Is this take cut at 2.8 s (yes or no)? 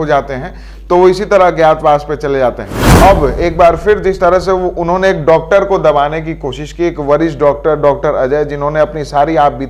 yes